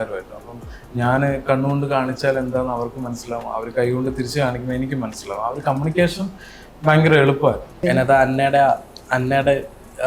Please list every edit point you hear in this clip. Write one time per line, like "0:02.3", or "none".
0:07.7